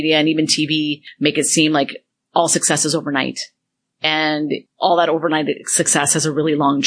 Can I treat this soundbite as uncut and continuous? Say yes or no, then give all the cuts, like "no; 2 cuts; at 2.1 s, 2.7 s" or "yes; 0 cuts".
no; 2 cuts; at 1.0 s, 4.2 s